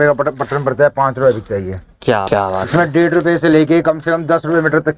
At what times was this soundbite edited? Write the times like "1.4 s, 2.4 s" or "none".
2.3 s